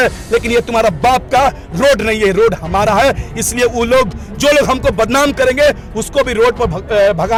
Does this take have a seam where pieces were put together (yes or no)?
no